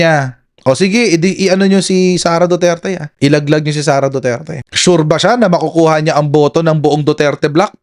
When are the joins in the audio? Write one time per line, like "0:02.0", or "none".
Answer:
none